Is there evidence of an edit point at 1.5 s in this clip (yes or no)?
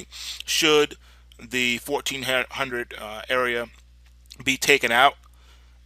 no